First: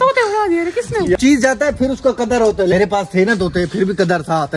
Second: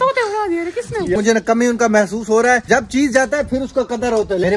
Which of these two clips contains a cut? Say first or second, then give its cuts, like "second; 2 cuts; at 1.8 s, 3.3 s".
first; 1 cut; at 1.2 s